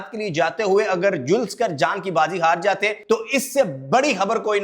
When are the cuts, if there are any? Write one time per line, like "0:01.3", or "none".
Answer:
0:03.0